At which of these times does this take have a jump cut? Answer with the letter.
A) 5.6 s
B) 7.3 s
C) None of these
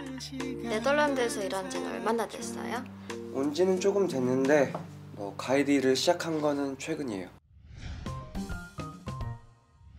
B